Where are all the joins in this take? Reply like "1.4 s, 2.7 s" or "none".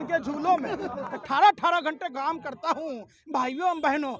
1.2 s